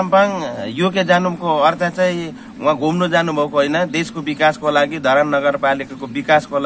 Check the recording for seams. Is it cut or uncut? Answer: uncut